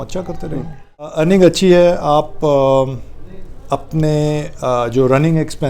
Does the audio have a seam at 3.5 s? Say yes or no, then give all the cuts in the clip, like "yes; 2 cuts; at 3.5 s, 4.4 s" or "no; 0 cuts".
no; 1 cut; at 1.1 s